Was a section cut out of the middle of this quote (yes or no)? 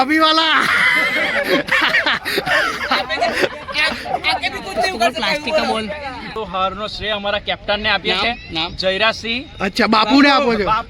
yes